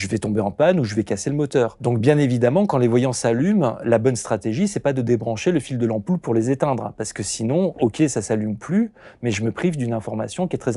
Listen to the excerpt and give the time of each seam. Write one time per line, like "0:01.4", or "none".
0:01.8

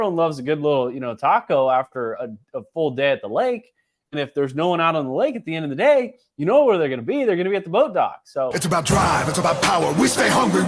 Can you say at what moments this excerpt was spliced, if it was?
0:08.6

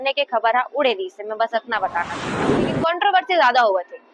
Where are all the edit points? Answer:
0:02.7

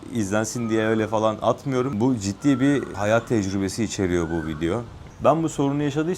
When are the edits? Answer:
0:01.9
0:02.9
0:05.0

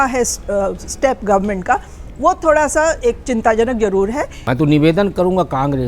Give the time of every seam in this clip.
0:04.4

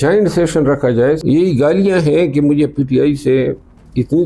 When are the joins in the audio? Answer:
0:01.2

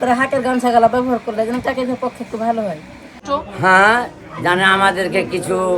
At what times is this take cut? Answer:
0:03.2

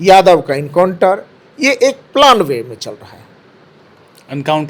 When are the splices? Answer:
none

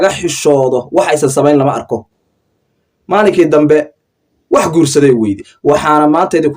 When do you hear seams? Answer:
0:05.5

